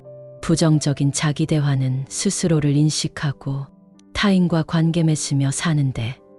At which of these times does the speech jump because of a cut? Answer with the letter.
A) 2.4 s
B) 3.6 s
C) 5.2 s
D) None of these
D